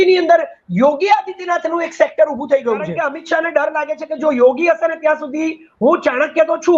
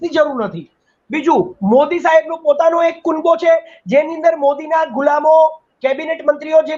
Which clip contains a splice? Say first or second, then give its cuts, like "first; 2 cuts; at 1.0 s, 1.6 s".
first; 1 cut; at 3.1 s